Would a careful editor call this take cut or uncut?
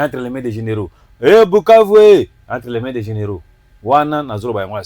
uncut